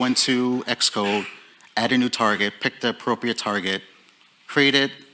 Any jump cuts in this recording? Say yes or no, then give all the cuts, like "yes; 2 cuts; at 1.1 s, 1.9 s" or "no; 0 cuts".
no; 0 cuts